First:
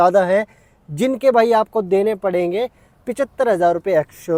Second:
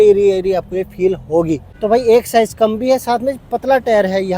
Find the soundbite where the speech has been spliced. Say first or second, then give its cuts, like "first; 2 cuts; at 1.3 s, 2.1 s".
second; 1 cut; at 1.7 s